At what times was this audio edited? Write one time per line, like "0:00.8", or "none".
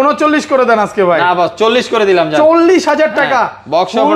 none